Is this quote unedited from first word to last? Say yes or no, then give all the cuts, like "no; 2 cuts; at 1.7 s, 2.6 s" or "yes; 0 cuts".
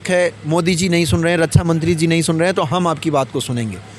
yes; 0 cuts